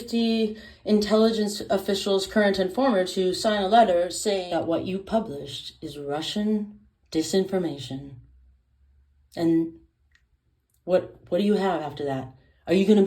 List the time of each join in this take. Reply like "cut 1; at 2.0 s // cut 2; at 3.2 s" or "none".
cut 1; at 4.4 s